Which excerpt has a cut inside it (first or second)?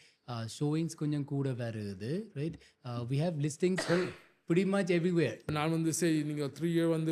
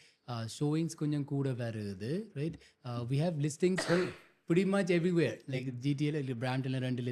first